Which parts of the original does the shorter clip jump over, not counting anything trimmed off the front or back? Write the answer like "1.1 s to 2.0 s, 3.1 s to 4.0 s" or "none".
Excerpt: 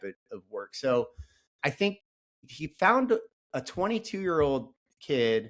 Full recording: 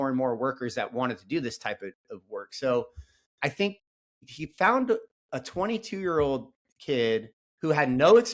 none